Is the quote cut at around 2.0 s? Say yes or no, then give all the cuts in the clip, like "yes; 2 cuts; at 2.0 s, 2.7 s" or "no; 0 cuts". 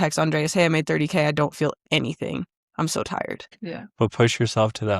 no; 1 cut; at 3.6 s